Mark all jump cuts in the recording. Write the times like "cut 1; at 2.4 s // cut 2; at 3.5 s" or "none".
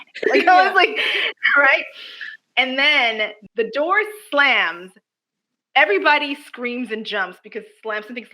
cut 1; at 3.4 s